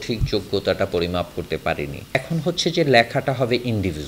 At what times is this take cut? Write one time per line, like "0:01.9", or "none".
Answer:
0:02.2